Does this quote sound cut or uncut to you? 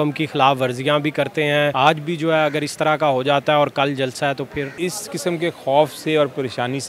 cut